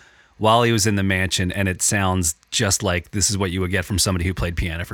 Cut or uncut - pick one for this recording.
uncut